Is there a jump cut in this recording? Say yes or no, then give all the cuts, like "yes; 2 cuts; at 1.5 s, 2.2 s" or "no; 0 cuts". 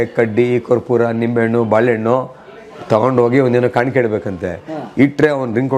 no; 0 cuts